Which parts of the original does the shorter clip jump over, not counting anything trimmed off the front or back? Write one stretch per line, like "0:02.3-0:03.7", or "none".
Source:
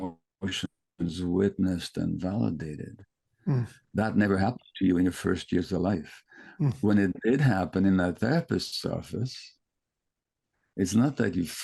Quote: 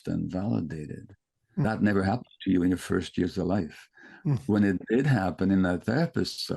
0:03.5-0:04.0